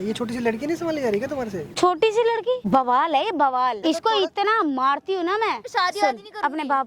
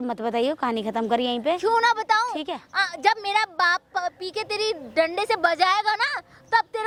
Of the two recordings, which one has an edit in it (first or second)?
first